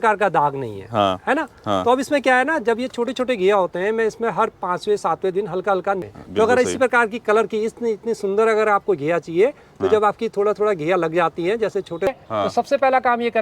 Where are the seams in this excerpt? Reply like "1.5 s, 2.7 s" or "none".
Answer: 6.0 s, 12.1 s